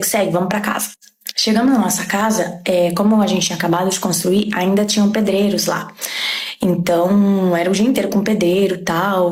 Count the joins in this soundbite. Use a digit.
0